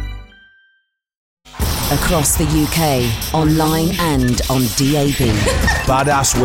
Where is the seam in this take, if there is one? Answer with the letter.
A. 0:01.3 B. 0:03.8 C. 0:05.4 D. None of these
A